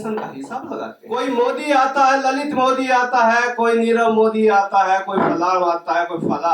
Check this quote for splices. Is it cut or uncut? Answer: cut